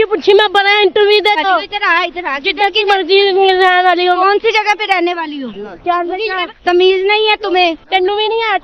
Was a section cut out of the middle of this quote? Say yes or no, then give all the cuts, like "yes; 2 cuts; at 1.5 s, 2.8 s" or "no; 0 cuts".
yes; 2 cuts; at 1.4 s, 6.5 s